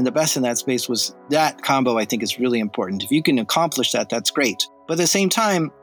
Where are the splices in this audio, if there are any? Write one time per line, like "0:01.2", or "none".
0:01.1
0:04.7

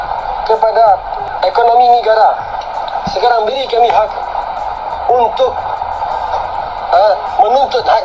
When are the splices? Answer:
0:01.3

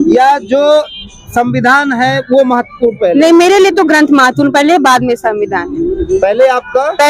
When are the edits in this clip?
none

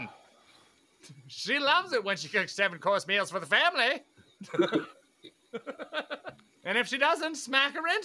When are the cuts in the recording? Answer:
0:06.5

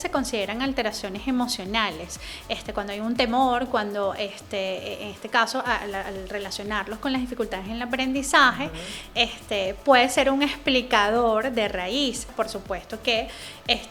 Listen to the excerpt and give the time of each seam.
0:12.3

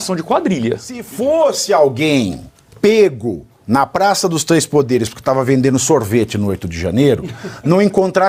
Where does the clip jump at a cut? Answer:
0:01.1

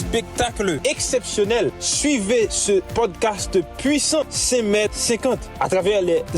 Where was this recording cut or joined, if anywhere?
0:05.4

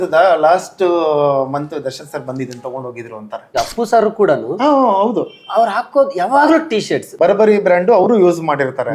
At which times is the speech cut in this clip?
0:03.4
0:07.1

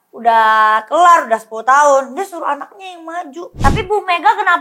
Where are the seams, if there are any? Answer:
0:03.5

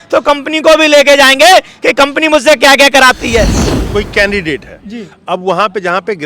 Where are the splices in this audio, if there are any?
0:03.6

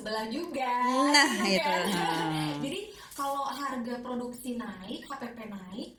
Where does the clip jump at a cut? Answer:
none

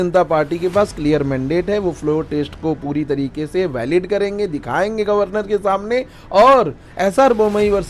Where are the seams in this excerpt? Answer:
none

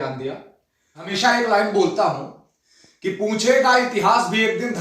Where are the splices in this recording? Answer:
0:01.1

